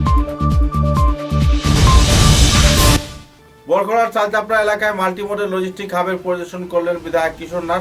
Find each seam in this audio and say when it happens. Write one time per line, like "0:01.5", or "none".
0:03.1